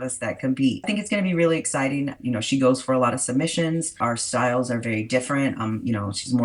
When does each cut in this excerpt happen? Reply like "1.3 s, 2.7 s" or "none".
0.9 s, 2.2 s, 4.0 s